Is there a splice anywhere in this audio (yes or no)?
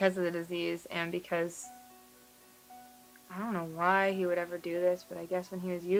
no